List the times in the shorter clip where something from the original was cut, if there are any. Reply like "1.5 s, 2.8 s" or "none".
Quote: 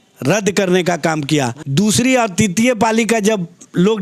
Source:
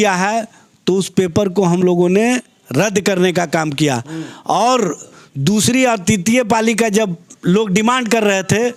1.6 s